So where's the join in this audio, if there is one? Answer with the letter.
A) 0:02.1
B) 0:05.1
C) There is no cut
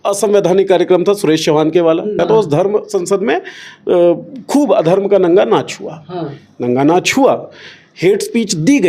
A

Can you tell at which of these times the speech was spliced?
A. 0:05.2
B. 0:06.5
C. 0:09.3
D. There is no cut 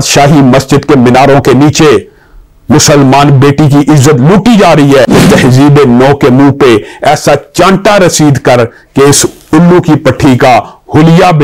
A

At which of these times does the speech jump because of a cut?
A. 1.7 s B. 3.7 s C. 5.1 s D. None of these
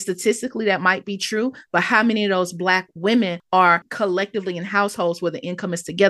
B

